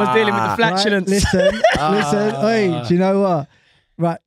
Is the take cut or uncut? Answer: uncut